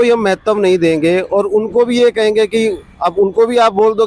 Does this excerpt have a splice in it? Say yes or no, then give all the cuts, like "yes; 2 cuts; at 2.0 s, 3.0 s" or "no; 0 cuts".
no; 0 cuts